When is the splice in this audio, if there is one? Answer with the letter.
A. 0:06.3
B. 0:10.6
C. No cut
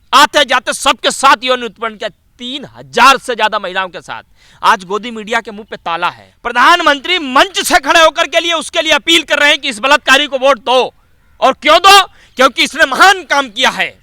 A